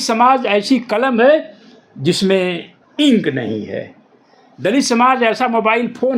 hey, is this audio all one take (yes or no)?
yes